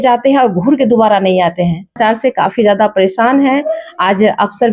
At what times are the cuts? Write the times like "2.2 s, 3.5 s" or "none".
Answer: 2.0 s